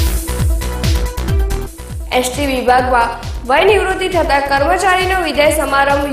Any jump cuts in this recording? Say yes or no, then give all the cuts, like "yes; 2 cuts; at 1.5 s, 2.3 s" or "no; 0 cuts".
yes; 1 cut; at 1.4 s